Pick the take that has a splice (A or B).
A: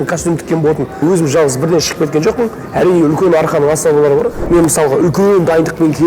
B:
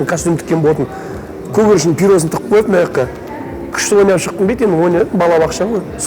A